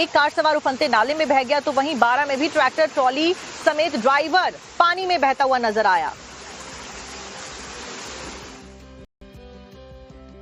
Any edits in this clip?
no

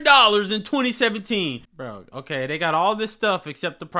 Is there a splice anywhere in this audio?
yes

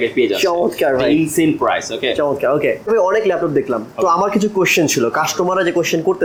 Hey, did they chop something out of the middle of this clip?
no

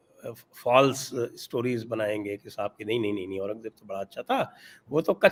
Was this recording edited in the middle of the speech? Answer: no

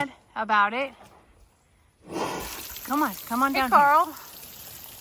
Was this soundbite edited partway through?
yes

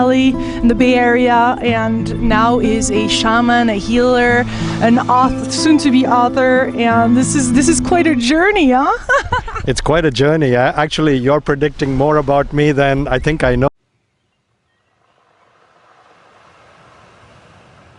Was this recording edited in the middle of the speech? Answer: no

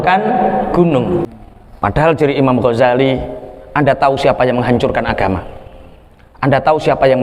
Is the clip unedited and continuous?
no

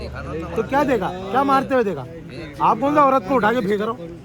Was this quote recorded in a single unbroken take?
yes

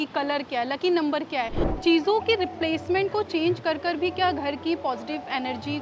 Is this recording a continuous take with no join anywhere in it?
no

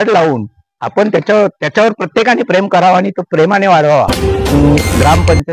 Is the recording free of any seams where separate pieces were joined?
no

